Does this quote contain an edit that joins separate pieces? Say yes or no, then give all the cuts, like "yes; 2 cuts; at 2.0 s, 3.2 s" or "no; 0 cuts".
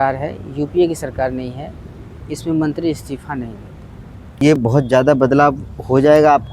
yes; 1 cut; at 4.4 s